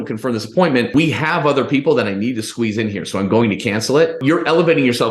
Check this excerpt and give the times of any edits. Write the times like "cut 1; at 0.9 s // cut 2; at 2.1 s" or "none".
cut 1; at 0.9 s // cut 2; at 4.2 s